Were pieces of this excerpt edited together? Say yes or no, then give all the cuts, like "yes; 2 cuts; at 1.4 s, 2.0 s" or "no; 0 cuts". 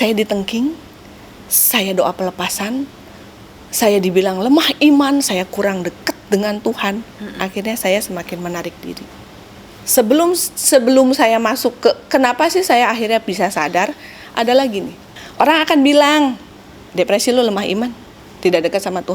no; 0 cuts